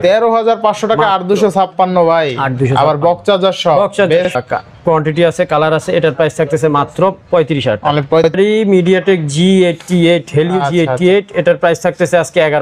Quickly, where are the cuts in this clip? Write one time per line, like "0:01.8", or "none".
0:04.4
0:08.4